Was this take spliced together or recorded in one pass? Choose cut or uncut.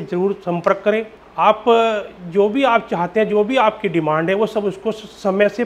cut